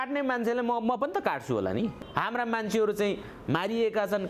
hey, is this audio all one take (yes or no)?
no